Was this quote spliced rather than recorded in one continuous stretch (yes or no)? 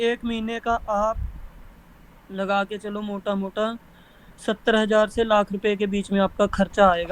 no